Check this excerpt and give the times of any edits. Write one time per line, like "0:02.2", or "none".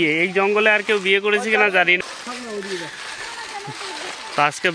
0:02.0